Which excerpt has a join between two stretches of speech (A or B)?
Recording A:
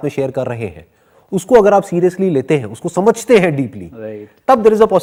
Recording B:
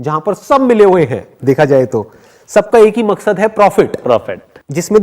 B